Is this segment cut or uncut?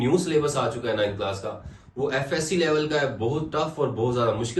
uncut